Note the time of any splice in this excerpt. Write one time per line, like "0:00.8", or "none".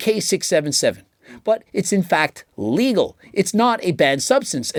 none